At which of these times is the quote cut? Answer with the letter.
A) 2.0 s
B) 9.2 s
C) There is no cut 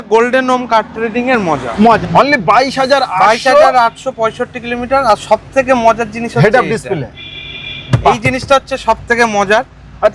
A